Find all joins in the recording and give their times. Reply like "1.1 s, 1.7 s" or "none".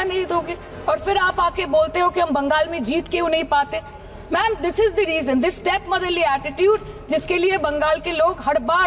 none

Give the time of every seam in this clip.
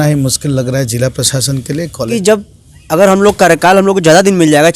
2.1 s

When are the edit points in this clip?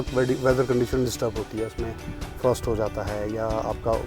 none

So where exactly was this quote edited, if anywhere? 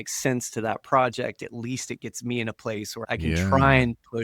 1.4 s, 3.0 s

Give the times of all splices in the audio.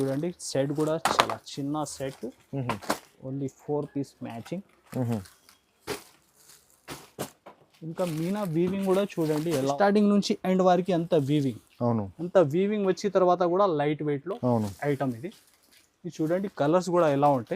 9.7 s

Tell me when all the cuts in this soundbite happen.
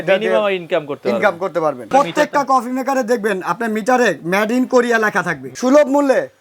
1.8 s, 5.4 s

